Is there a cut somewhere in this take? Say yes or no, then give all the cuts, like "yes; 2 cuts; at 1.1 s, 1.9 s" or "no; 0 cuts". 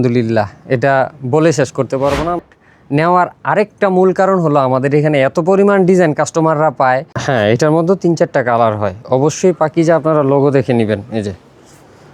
yes; 2 cuts; at 2.4 s, 7.1 s